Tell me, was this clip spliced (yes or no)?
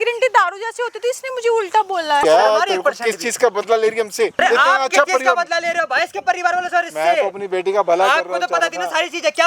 yes